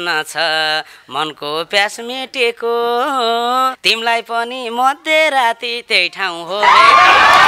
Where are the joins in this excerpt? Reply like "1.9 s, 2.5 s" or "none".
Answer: 3.8 s

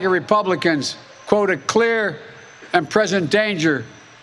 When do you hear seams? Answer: none

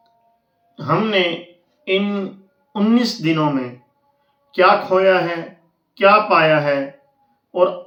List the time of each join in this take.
none

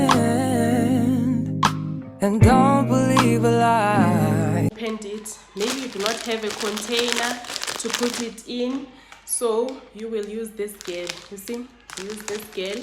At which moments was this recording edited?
4.7 s

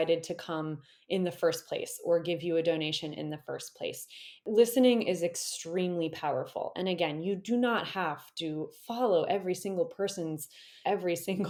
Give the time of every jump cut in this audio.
none

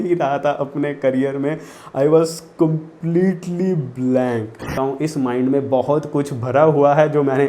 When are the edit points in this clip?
4.6 s

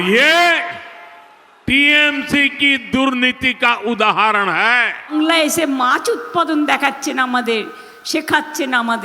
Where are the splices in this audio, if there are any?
5.1 s

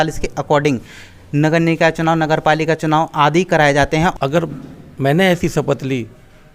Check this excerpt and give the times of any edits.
4.1 s

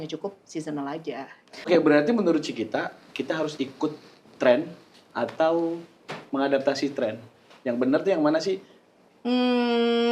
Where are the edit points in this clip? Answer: 1.7 s

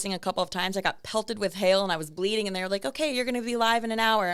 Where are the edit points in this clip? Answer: none

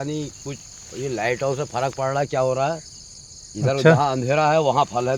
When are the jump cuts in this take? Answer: none

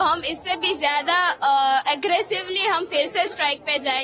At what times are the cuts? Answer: none

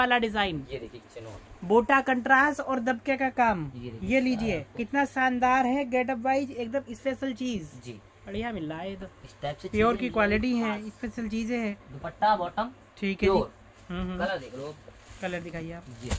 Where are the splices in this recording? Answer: none

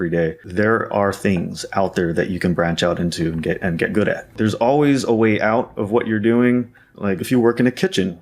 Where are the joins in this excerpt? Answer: 4.3 s

